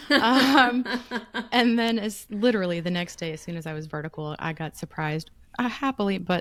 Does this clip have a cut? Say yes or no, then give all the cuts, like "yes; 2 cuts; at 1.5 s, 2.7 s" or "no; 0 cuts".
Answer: no; 0 cuts